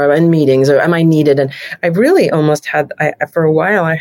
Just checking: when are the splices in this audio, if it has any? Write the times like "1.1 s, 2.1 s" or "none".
none